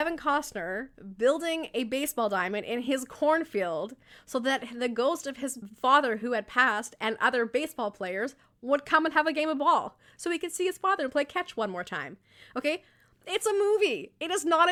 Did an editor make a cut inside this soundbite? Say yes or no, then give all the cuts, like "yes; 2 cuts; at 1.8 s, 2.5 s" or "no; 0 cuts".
no; 0 cuts